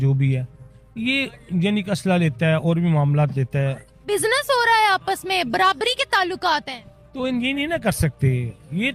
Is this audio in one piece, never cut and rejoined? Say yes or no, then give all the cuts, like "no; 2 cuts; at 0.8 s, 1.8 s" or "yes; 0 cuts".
yes; 0 cuts